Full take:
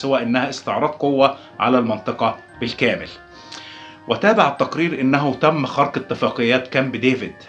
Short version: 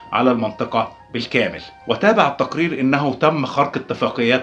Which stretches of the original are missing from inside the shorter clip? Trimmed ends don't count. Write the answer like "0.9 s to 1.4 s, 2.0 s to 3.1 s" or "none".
3.1 s to 3.9 s